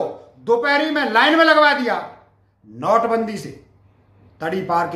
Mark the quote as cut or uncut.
uncut